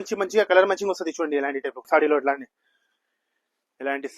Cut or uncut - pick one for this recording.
cut